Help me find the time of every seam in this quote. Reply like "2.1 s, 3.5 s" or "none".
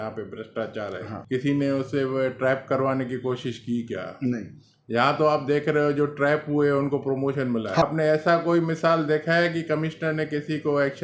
1.1 s, 7.8 s